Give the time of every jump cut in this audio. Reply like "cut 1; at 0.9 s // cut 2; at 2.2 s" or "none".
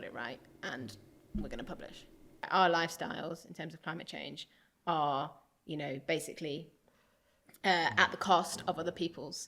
cut 1; at 2.5 s